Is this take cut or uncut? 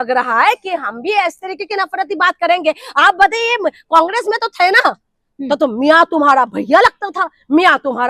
uncut